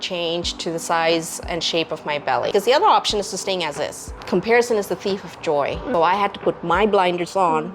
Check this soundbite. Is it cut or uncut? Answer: cut